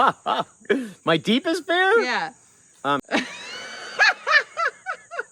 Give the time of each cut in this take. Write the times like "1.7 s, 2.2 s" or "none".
3.0 s